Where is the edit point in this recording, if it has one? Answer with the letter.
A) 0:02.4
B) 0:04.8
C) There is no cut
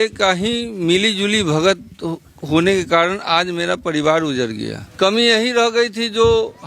B